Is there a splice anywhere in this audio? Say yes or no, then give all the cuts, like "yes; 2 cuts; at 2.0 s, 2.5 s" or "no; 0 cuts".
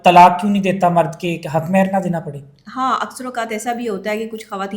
no; 0 cuts